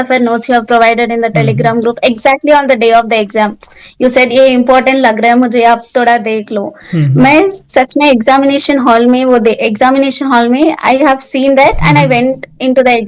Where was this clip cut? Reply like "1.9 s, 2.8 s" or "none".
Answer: none